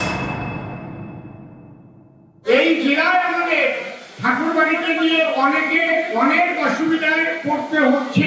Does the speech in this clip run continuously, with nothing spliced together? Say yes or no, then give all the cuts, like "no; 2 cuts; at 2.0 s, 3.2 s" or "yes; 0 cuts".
no; 1 cut; at 2.4 s